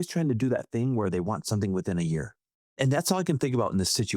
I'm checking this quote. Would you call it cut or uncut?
cut